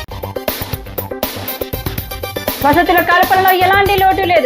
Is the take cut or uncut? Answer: uncut